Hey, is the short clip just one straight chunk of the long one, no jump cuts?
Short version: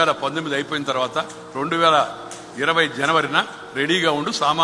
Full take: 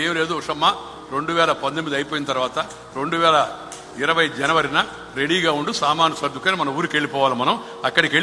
yes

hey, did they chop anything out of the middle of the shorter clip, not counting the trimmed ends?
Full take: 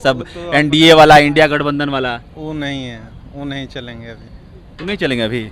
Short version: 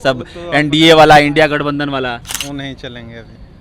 yes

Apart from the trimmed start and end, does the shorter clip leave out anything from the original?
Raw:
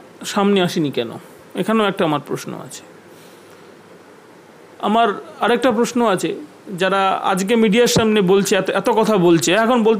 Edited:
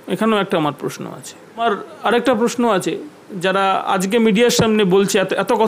yes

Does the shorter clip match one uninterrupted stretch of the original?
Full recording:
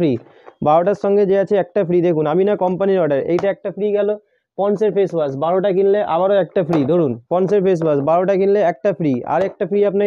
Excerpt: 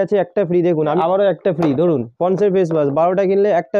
no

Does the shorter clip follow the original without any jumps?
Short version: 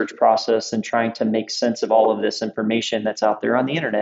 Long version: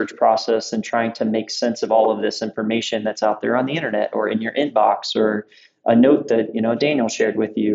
yes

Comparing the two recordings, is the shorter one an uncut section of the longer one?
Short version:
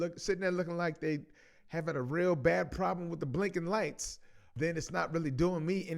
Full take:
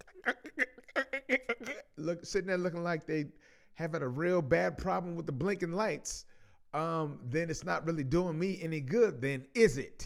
no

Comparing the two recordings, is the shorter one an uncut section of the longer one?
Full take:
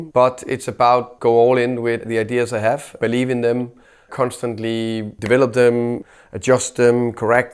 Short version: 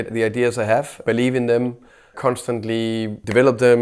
yes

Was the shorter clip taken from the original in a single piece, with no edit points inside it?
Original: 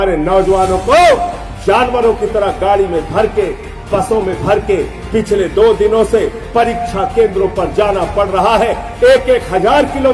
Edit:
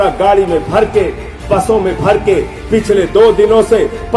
yes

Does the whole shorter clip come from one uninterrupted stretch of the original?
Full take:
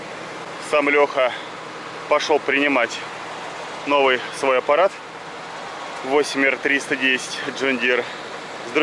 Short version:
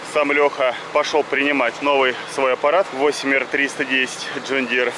no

